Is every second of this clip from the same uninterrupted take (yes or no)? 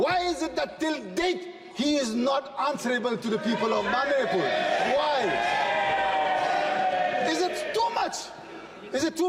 yes